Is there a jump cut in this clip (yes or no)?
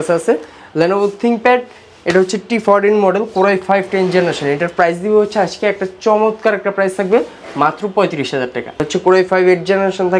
yes